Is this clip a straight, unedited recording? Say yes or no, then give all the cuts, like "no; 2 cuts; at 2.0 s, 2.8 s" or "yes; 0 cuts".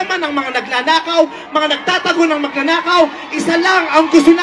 yes; 0 cuts